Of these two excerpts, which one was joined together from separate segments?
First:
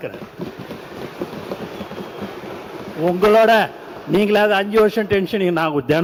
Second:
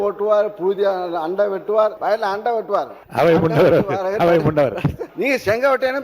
second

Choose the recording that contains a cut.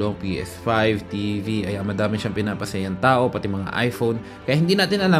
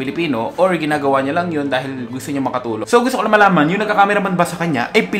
second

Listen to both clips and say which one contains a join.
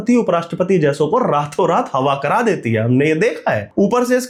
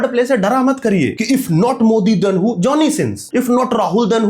second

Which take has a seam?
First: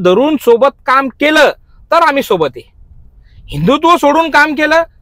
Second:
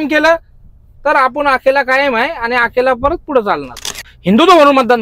second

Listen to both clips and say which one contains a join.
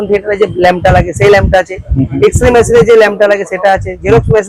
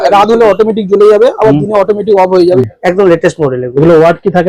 second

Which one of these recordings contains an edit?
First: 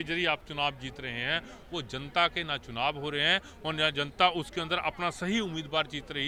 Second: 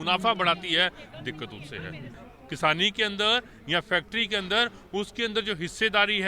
second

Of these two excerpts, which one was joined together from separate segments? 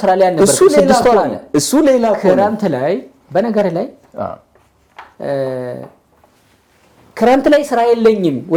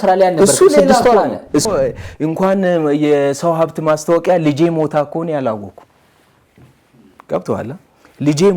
second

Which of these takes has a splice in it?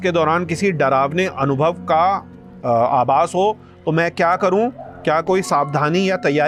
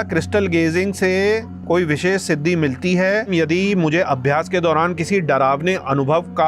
second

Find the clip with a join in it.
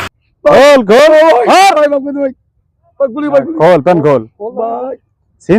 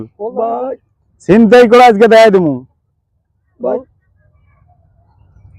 second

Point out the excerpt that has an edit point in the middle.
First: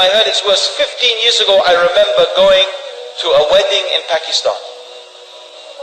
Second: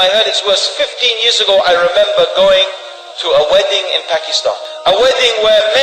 second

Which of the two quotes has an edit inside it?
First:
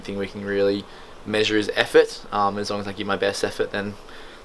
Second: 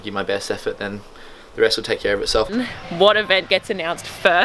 second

